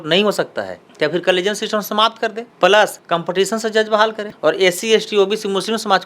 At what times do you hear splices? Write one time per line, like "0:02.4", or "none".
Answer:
0:03.0
0:04.3